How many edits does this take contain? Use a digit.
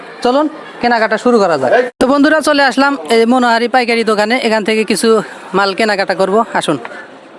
0